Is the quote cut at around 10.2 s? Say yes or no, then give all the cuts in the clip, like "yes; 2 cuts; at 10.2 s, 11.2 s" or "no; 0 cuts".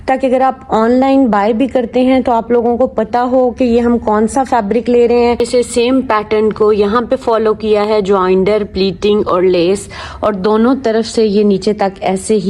no; 1 cut; at 5.4 s